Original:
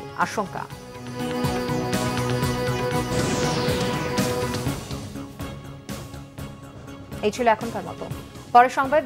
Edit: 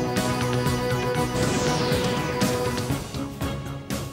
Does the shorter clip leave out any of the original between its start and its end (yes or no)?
yes